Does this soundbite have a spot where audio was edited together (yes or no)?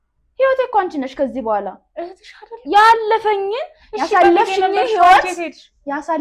no